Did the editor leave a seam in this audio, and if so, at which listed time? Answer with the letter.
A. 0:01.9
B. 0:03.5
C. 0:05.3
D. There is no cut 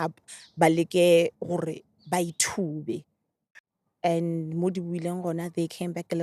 B